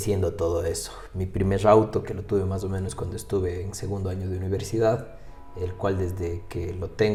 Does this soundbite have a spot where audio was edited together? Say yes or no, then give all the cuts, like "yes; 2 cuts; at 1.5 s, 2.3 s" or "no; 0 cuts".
no; 0 cuts